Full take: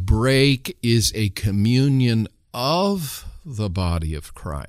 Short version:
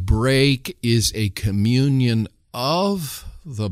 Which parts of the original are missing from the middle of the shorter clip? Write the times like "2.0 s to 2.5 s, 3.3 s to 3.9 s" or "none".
none